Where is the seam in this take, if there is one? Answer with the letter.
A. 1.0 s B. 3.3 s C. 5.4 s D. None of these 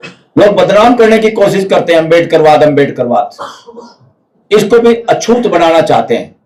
D